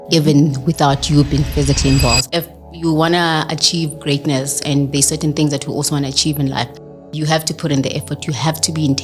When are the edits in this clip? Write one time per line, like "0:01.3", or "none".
0:02.2

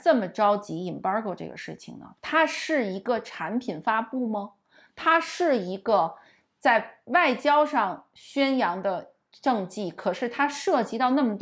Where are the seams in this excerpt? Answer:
none

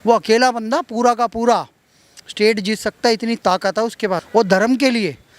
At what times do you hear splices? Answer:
0:04.2

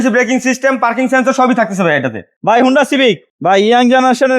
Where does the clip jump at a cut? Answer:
0:02.3
0:03.3

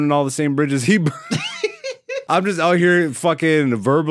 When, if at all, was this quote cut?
0:02.2

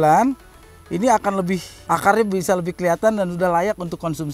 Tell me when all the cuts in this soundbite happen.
0:01.7

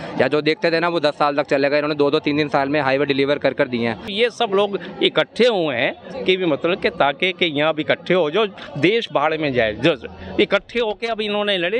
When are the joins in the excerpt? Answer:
0:04.1

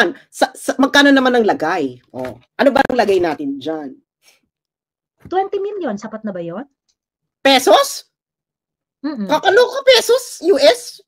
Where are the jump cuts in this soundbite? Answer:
none

